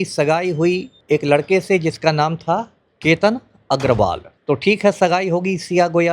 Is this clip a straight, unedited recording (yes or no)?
no